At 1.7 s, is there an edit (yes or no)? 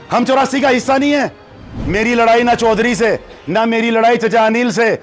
yes